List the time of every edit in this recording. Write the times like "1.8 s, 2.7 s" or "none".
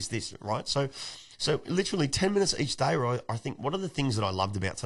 none